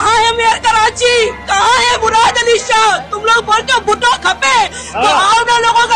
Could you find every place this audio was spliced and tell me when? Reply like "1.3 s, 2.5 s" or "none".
none

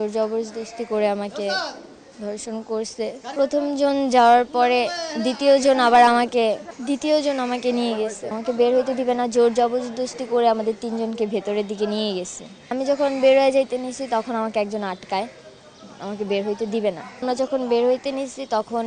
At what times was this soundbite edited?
3.3 s, 8.3 s, 12.7 s, 17.2 s

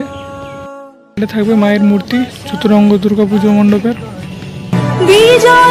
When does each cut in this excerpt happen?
none

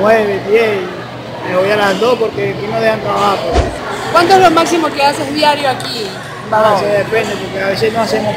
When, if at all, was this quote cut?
3.9 s

